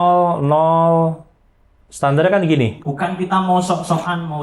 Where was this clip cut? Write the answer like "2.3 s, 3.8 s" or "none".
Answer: 2.8 s